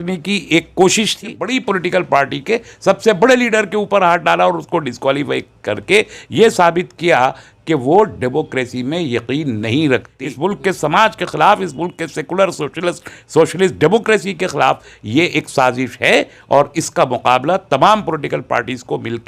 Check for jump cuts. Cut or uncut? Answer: cut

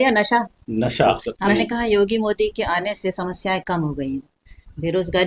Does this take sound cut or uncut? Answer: cut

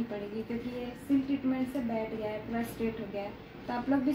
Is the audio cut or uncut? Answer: uncut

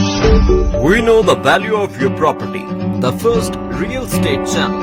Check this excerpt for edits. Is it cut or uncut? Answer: uncut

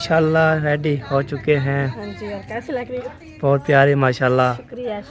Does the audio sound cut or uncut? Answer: uncut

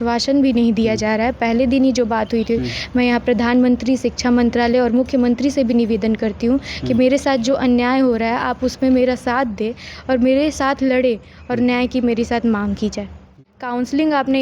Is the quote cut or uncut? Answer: cut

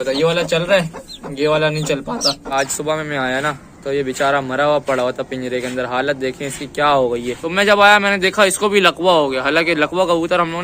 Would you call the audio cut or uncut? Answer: cut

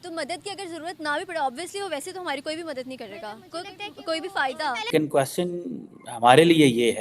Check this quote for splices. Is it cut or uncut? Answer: cut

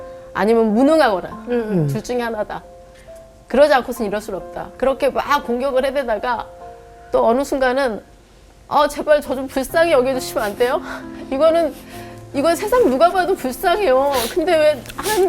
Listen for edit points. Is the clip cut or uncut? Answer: cut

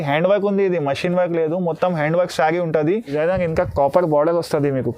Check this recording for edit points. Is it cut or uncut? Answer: cut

